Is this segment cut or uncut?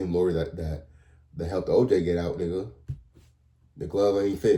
uncut